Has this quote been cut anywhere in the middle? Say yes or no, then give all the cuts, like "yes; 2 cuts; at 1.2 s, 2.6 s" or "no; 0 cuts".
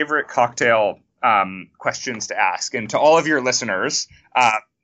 no; 0 cuts